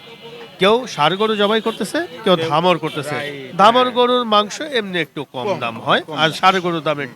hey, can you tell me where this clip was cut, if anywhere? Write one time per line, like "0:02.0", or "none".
none